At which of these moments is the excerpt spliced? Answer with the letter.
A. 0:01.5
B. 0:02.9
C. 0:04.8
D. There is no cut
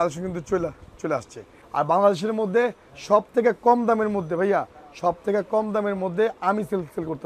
A